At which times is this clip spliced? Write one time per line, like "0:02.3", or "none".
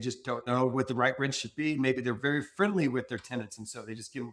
none